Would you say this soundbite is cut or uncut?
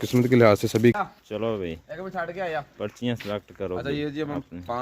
cut